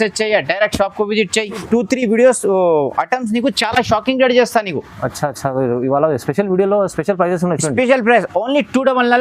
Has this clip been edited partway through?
yes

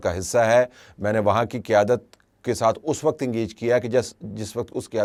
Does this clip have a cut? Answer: no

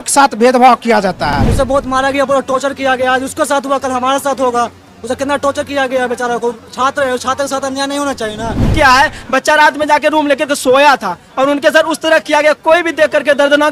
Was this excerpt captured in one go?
no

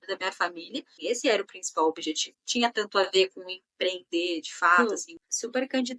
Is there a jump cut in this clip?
yes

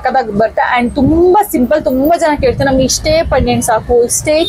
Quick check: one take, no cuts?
yes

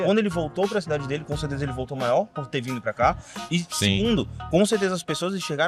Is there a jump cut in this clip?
no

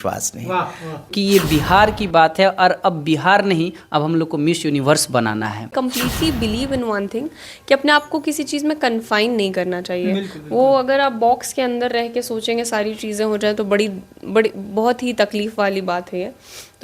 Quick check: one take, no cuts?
no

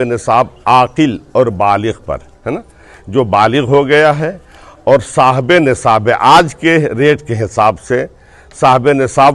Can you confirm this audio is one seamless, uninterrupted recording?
yes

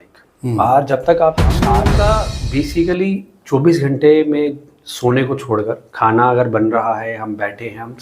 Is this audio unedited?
no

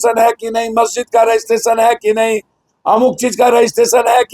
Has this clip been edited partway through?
no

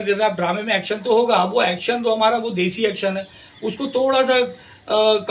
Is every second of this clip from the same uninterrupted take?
yes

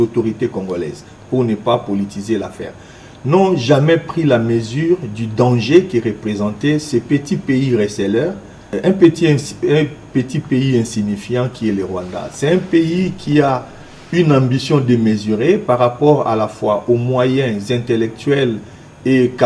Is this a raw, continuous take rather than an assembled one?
no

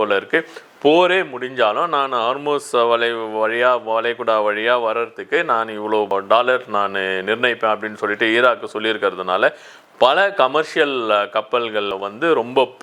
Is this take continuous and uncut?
yes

